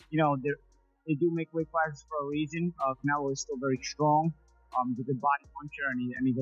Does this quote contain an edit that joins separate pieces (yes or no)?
no